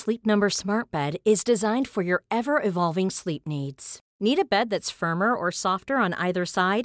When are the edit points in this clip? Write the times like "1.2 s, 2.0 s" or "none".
none